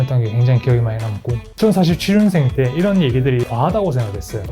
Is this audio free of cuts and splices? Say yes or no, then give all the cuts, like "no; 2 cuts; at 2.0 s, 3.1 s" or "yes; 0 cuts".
no; 2 cuts; at 1.4 s, 3.5 s